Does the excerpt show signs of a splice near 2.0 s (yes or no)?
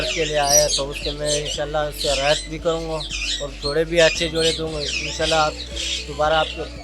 no